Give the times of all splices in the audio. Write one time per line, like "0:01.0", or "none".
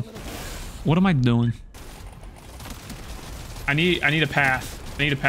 0:01.8